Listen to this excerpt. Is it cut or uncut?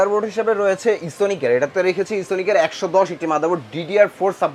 uncut